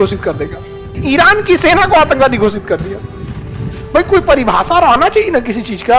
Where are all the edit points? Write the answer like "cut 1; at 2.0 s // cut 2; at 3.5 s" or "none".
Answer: cut 1; at 1.0 s

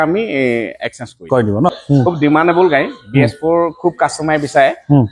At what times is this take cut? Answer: cut 1; at 1.7 s

